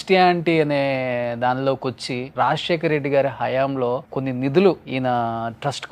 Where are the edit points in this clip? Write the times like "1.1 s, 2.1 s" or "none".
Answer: 2.3 s, 4.1 s, 4.8 s